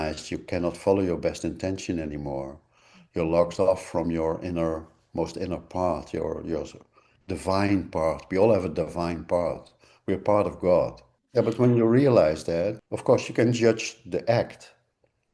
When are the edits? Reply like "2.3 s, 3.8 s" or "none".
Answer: 12.8 s